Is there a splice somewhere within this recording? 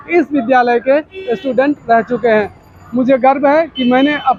no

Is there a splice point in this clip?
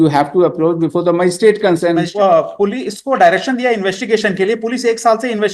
yes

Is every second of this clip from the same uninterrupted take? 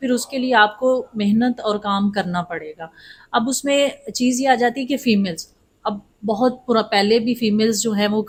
yes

